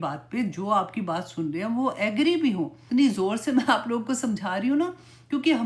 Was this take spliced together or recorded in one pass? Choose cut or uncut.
cut